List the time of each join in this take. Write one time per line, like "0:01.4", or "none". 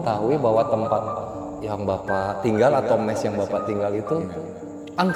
none